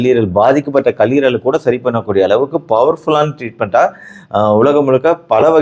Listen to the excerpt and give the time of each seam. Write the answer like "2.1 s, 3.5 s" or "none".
none